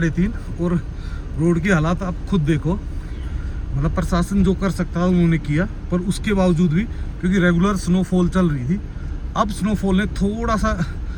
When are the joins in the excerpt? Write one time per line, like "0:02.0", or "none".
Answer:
none